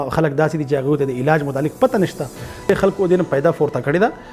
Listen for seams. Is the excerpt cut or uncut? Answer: cut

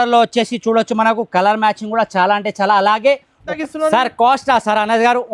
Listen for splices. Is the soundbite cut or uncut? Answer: cut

